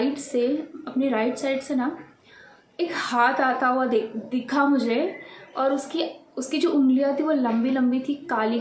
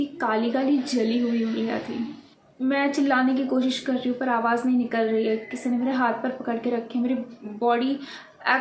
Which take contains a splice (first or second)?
second